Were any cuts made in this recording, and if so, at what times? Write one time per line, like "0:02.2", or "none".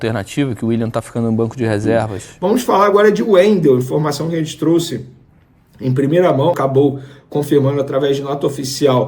0:02.2
0:06.6